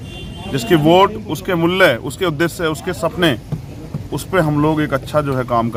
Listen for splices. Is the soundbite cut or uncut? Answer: uncut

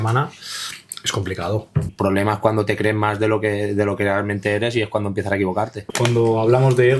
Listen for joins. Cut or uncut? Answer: cut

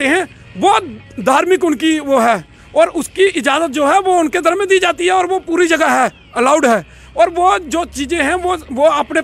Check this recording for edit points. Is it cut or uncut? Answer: uncut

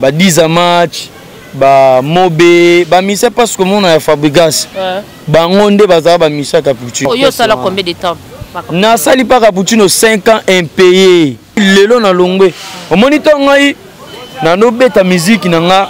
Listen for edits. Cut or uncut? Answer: cut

